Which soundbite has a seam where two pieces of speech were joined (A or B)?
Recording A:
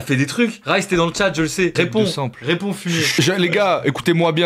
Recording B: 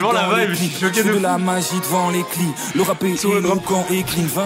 A